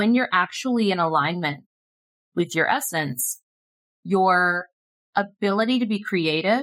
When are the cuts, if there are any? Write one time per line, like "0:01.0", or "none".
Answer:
none